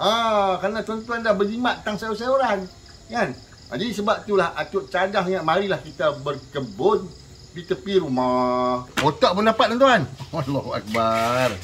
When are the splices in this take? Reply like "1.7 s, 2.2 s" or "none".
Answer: 8.9 s